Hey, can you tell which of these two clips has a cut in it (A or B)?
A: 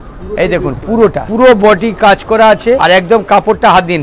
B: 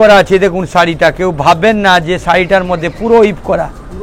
A